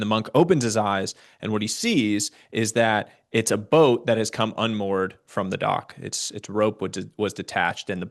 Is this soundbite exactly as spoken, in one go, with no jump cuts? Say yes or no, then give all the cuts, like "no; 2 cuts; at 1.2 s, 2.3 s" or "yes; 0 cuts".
yes; 0 cuts